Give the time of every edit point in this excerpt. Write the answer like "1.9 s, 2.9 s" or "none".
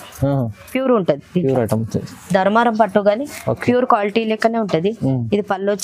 none